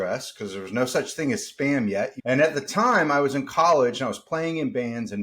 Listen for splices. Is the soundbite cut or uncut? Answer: cut